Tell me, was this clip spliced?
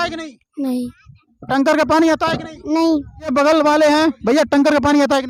no; 0 cuts

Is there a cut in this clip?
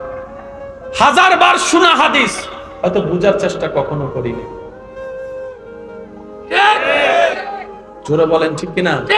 yes; 2 cuts; at 4.7 s, 6.2 s

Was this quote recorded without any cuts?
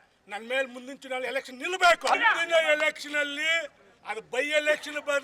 no; 1 cut; at 2.2 s

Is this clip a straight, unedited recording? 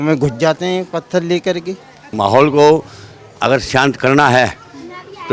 no; 1 cut; at 2.1 s

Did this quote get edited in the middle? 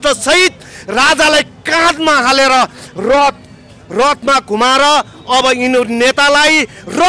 no; 0 cuts

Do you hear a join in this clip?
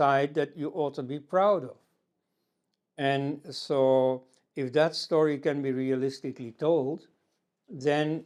no; 0 cuts

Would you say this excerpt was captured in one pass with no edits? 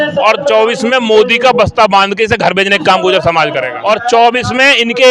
no; 1 cut; at 3.7 s

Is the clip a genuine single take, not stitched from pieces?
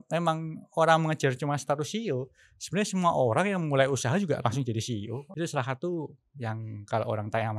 no; 1 cut; at 5.3 s

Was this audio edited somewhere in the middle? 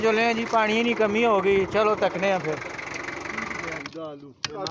yes; 1 cut; at 3.8 s

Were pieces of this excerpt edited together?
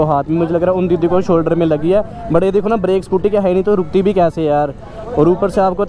no; 0 cuts

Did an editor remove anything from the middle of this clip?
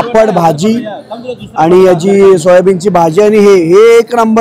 no; 0 cuts

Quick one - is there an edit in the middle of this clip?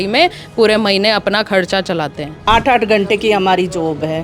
yes; 1 cut; at 2.4 s

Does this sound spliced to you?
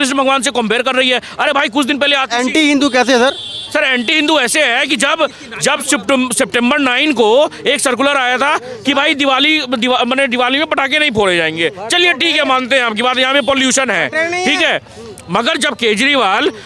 no; 0 cuts

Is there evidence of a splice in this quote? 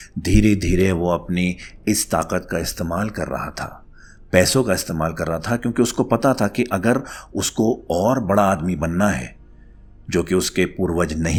no; 0 cuts

